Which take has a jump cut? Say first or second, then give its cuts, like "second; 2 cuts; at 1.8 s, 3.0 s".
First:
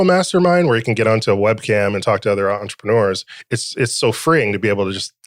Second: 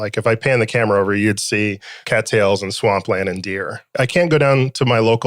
second; 2 cuts; at 1.9 s, 3.9 s